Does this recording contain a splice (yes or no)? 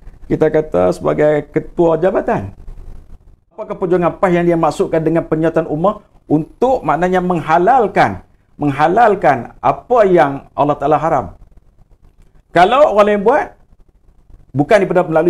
yes